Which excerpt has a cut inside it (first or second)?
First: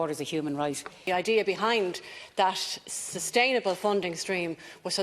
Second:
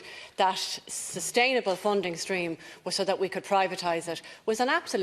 first